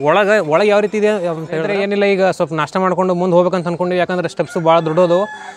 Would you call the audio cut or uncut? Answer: cut